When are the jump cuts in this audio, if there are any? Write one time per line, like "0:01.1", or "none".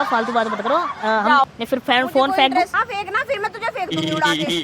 0:01.5
0:02.8